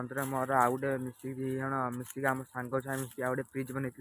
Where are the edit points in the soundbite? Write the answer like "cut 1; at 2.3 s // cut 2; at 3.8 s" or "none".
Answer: none